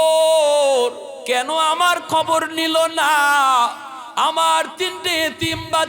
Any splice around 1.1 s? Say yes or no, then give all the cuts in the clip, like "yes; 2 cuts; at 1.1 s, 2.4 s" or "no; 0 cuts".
yes; 1 cut; at 1.1 s